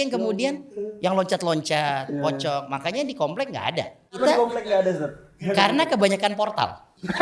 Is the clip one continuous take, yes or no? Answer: no